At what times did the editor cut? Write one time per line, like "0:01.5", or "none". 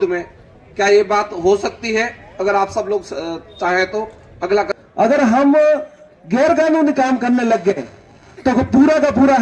0:04.7